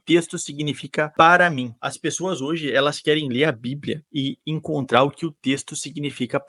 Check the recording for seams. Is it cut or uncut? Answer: uncut